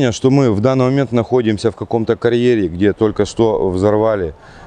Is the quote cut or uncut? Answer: uncut